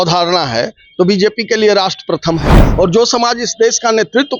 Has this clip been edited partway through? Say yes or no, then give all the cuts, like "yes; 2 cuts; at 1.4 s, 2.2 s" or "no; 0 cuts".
yes; 1 cut; at 2.6 s